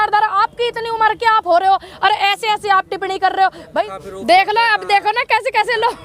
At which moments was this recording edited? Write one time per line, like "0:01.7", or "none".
0:03.9